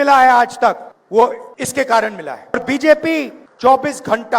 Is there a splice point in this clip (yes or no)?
yes